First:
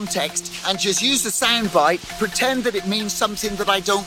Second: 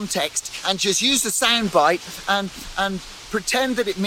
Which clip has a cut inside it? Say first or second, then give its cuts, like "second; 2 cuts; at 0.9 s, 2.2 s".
first; 1 cut; at 2.1 s